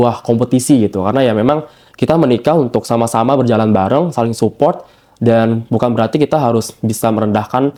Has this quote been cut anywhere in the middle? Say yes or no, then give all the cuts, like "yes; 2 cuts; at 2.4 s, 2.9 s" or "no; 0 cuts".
no; 0 cuts